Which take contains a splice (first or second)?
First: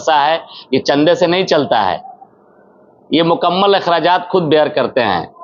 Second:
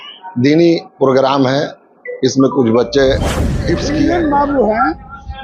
second